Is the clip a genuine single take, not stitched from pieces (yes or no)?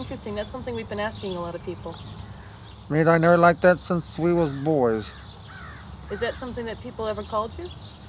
yes